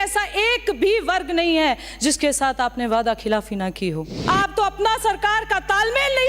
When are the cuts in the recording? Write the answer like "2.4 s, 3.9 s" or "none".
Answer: 4.1 s